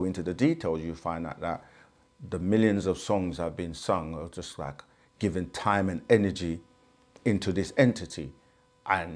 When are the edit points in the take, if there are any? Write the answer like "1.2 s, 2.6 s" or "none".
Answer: none